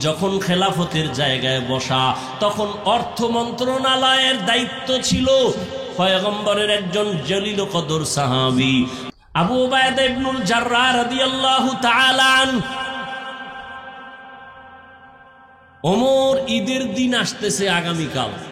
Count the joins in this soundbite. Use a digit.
1